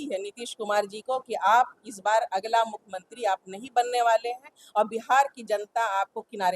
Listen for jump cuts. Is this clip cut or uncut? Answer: uncut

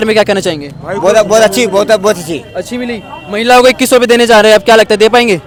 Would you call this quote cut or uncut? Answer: uncut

